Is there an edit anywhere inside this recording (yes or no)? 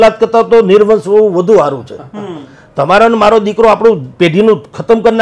no